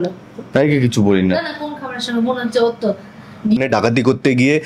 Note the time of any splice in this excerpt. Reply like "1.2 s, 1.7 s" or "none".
3.6 s